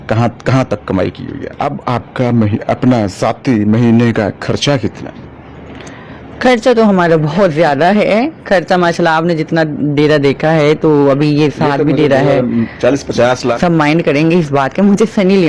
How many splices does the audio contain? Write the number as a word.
two